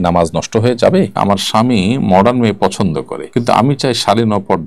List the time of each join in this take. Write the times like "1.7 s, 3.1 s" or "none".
1.1 s, 3.2 s